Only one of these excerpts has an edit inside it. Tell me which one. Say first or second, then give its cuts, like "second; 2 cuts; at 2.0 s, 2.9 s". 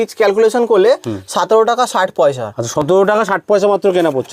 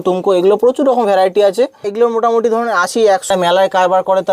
second; 2 cuts; at 1.8 s, 3.3 s